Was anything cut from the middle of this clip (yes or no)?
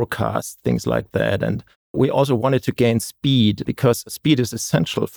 yes